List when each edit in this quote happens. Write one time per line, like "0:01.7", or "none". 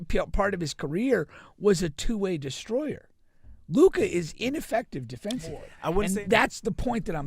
0:05.8